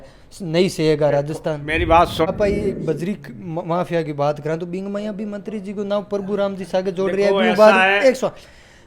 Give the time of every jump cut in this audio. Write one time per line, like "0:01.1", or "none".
0:02.2